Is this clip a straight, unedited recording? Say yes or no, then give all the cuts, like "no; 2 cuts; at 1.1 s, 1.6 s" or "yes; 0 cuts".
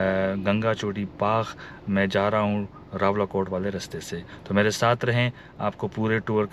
yes; 0 cuts